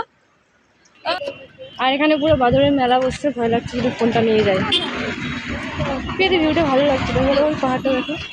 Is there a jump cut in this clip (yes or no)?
yes